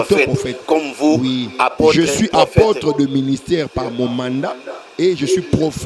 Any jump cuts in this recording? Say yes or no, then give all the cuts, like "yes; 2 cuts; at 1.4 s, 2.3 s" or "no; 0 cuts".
no; 0 cuts